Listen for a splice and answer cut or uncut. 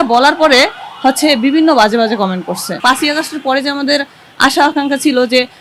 cut